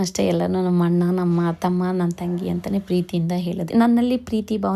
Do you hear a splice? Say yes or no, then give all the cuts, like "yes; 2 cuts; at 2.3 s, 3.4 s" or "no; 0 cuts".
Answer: yes; 1 cut; at 3.6 s